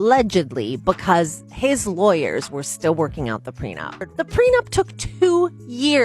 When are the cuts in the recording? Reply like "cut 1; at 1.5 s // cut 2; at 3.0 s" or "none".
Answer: cut 1; at 4.1 s